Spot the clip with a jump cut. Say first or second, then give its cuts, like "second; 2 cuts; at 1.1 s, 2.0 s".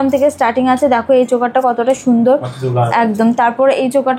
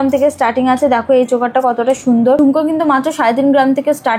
second; 1 cut; at 2.4 s